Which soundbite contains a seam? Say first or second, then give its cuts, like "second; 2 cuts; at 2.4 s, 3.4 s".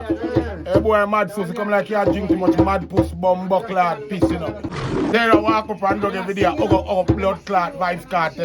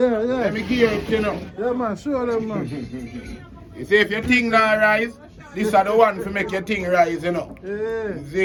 first; 1 cut; at 4.7 s